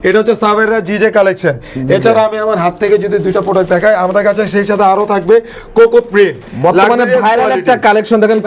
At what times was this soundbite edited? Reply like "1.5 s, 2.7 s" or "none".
none